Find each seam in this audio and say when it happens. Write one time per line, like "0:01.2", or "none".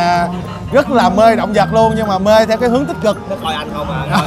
0:03.2